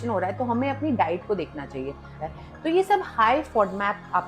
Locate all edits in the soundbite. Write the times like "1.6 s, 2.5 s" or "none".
2.2 s